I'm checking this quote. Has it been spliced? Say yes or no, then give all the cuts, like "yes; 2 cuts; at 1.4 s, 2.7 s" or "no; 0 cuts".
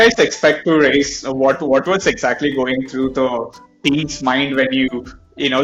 no; 0 cuts